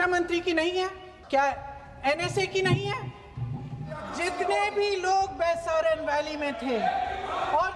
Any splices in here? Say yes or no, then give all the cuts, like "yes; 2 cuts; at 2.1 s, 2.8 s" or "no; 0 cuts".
yes; 2 cuts; at 1.1 s, 4.1 s